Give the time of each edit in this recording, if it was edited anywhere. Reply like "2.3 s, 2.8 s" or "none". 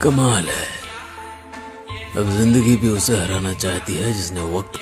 none